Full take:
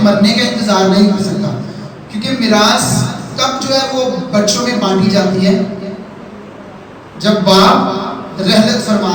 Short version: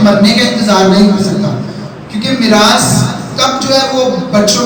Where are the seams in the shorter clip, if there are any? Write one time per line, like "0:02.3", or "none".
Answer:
none

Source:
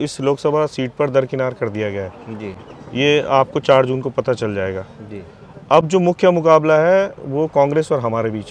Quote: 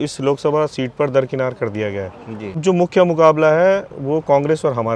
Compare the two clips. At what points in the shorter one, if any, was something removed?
0:02.6

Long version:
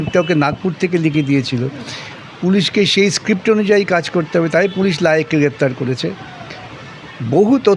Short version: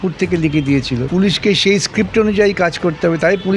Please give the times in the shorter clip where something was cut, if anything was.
0:01.1

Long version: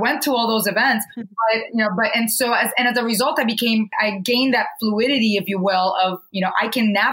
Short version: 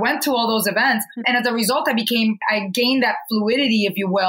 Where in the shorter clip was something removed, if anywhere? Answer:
0:01.2

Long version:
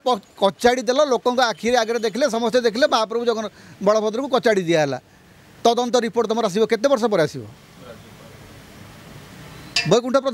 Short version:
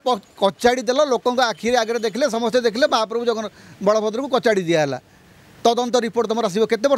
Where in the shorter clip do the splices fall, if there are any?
none

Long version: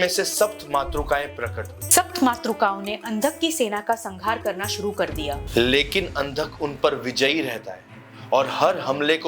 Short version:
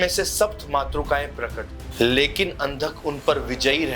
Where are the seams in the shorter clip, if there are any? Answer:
0:01.9

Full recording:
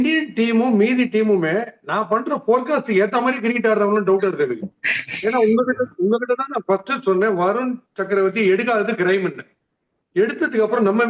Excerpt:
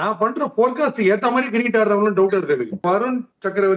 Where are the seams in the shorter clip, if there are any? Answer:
0:02.8

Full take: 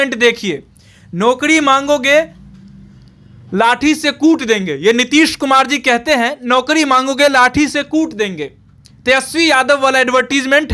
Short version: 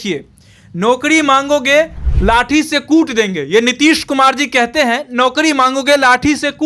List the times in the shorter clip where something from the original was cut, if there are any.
0:02.0

